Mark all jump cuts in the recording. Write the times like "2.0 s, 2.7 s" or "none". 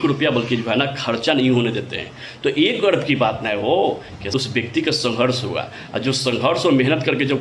4.1 s